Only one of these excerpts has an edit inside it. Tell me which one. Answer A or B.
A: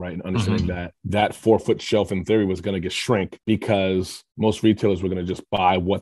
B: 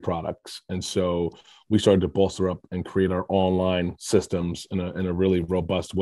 A